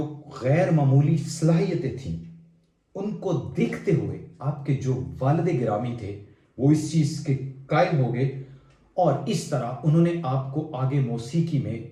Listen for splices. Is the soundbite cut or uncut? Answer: uncut